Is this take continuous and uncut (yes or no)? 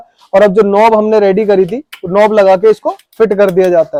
yes